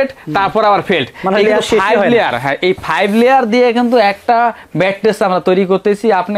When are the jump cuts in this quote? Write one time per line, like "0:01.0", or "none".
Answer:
none

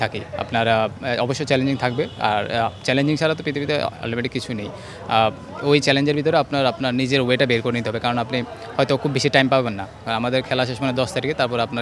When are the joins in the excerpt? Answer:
none

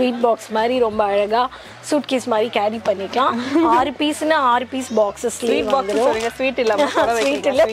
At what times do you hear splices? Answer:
none

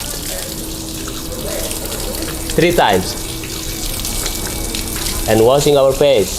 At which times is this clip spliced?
0:05.0

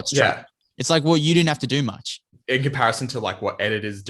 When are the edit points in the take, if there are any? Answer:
0:02.3

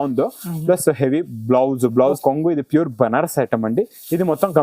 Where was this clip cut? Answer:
0:02.2

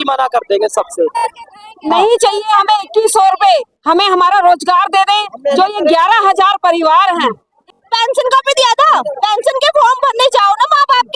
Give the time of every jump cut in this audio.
0:01.3
0:07.6

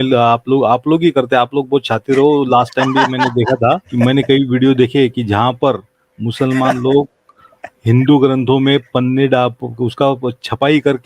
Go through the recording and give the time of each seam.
0:03.9

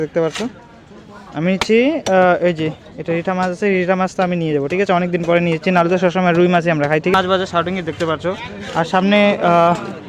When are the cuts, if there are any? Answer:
0:07.1

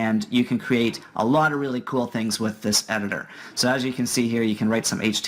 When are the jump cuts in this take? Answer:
0:01.5

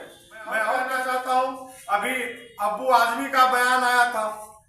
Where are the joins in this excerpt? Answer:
0:01.0

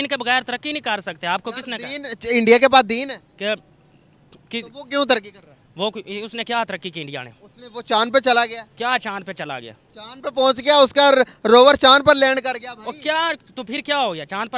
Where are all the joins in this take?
none

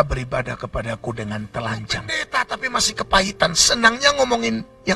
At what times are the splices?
0:02.2

